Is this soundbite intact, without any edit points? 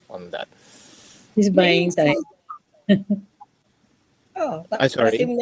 yes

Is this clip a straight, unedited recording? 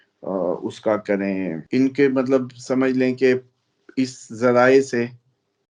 no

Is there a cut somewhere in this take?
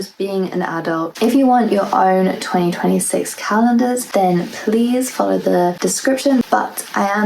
yes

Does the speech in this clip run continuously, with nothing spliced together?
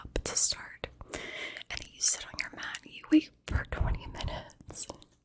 yes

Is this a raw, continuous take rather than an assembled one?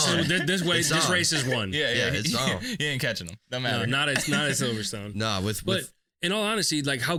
yes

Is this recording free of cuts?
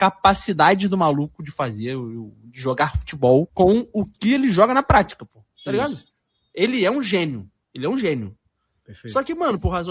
no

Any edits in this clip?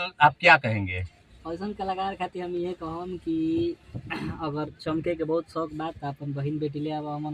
no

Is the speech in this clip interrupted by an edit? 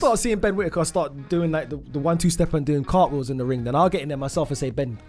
no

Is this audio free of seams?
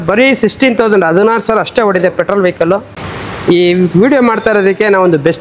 no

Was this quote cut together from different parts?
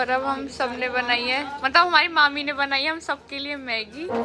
no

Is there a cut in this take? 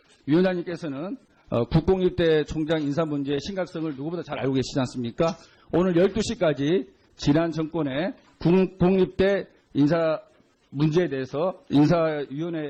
yes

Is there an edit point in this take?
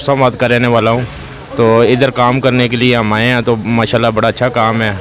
no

